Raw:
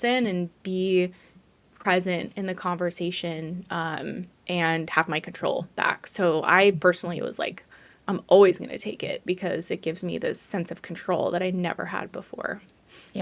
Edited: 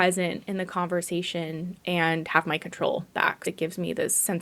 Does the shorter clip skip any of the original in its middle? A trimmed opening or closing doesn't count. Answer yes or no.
yes